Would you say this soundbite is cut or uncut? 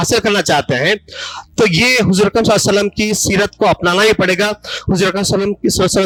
uncut